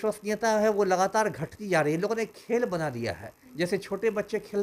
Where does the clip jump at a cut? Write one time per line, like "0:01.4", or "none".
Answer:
none